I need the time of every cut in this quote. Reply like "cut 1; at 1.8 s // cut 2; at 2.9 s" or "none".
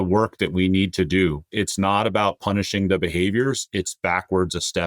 cut 1; at 1.4 s